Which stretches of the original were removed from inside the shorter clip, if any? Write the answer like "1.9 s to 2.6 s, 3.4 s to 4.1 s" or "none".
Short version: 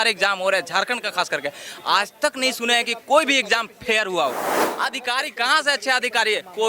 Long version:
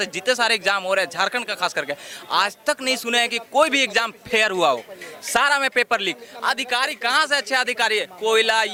5.1 s to 6.3 s